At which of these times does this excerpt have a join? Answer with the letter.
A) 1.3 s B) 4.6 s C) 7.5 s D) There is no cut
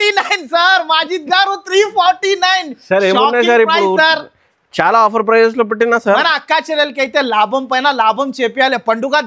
D